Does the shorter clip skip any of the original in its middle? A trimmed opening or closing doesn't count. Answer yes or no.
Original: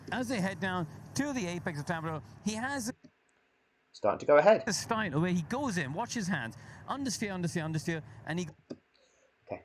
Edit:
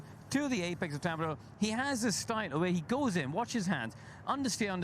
yes